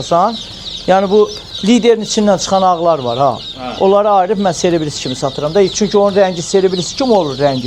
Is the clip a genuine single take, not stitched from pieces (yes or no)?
yes